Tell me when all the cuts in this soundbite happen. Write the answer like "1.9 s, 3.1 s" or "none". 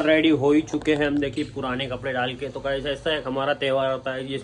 none